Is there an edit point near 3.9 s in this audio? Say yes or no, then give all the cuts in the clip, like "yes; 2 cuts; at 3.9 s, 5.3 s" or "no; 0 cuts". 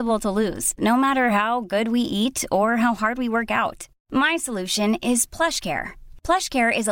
no; 0 cuts